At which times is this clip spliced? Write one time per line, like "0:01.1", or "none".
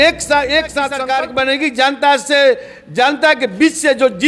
0:01.0